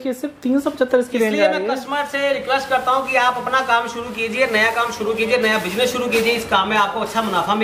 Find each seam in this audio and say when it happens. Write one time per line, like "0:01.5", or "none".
none